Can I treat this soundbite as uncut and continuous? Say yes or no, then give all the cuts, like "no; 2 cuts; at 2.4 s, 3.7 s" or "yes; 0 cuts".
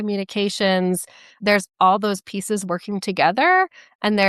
no; 1 cut; at 1.4 s